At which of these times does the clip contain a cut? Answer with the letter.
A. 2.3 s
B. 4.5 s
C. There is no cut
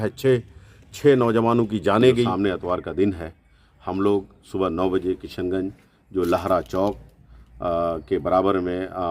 A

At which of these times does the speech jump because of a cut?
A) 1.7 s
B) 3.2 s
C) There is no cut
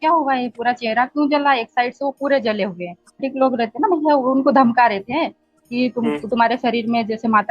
B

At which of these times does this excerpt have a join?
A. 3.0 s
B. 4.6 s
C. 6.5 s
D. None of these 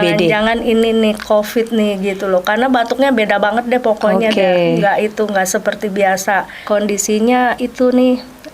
C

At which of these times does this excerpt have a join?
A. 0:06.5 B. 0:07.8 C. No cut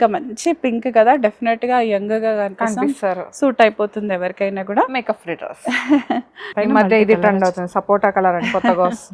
A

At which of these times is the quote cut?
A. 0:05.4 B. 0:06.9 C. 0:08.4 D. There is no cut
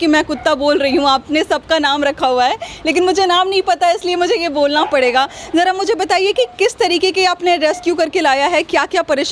D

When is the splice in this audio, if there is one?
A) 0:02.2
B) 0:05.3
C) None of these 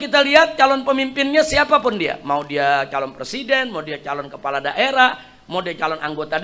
C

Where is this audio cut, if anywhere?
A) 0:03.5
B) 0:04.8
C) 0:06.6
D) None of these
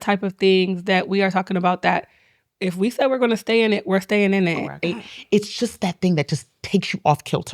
B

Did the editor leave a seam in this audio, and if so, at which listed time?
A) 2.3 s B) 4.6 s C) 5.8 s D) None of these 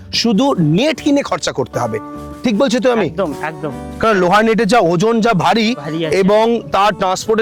D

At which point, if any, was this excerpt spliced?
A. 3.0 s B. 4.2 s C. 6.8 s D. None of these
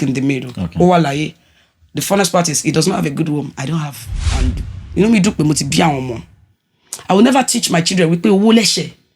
B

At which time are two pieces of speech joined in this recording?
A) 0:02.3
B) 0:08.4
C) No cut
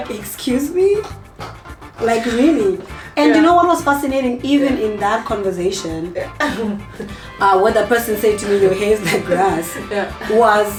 C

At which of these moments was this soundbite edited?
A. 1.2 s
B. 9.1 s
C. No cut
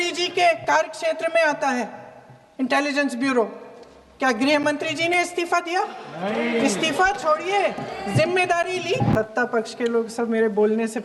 B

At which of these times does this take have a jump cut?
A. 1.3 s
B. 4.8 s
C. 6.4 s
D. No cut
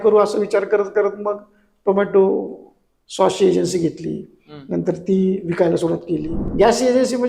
C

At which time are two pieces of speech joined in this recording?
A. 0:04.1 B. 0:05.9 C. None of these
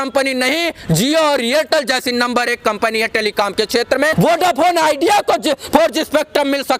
A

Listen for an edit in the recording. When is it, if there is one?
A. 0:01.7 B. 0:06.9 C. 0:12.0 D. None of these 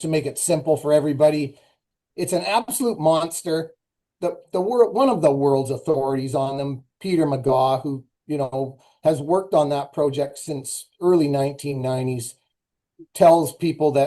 A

